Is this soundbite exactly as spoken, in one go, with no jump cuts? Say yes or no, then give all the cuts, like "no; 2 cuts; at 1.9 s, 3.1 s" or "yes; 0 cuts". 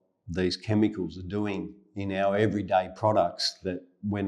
yes; 0 cuts